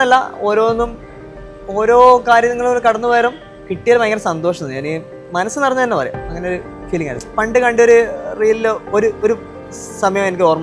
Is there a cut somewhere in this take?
yes; 1 cut; at 7.2 s

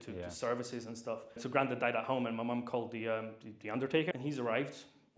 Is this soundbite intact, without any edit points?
no; 2 cuts; at 1.4 s, 4.1 s

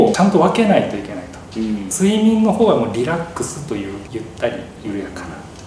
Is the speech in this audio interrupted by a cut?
yes; 1 cut; at 1.9 s

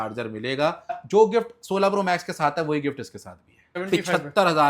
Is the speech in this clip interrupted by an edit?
yes; 2 cuts; at 1.0 s, 3.8 s

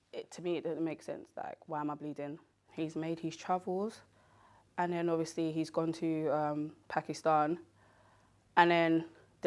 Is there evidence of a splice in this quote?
yes; 1 cut; at 2.6 s

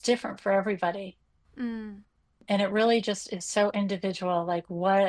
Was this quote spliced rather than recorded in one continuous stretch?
no; 0 cuts

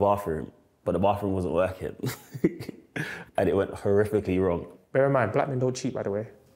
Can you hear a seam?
yes; 1 cut; at 4.7 s

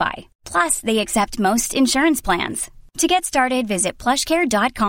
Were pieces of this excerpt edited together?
no; 0 cuts

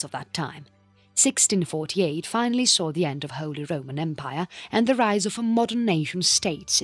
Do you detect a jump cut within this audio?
yes; 1 cut; at 2.6 s

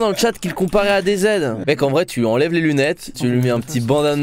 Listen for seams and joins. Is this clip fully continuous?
no; 2 cuts; at 1.6 s, 3.1 s

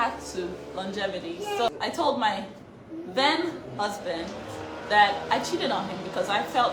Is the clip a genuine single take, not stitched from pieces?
no; 1 cut; at 1.7 s

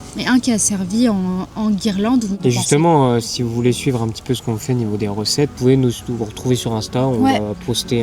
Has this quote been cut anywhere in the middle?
yes; 2 cuts; at 2.3 s, 5.6 s

